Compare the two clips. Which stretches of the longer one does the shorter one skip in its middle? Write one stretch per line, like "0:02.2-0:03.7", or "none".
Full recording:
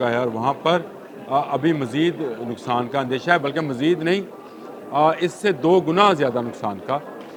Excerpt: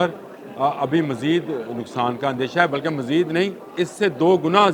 0:04.4-0:05.2